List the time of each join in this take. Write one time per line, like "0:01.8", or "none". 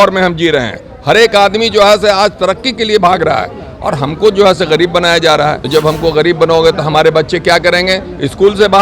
0:05.6